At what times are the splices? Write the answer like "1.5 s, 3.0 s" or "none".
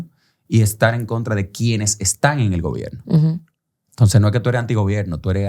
none